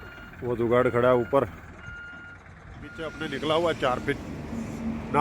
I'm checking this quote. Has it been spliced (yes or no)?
yes